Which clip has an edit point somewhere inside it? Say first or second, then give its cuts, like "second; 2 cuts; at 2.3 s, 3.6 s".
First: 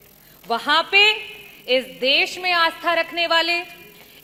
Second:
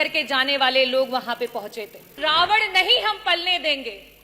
second; 1 cut; at 2.2 s